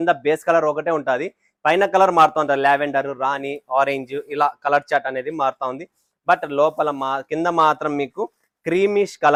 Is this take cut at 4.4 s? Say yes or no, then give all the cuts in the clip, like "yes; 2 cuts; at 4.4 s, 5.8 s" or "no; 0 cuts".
no; 0 cuts